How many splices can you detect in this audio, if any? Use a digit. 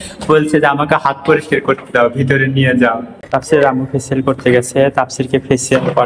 1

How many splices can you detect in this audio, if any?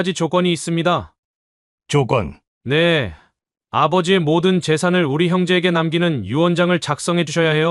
1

